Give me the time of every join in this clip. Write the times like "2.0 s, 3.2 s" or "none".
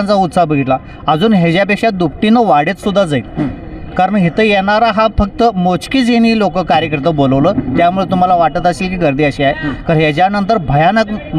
none